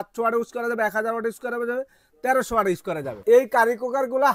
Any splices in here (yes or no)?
yes